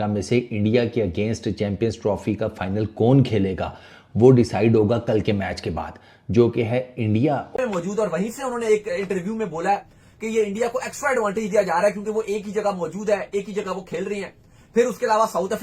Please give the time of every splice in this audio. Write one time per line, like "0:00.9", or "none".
0:07.6